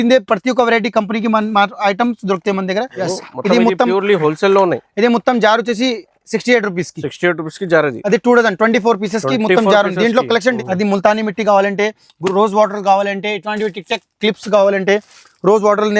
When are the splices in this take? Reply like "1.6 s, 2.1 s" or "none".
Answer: 3.0 s, 10.6 s